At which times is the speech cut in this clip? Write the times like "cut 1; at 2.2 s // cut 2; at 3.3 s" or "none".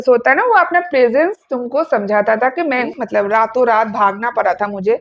cut 1; at 2.9 s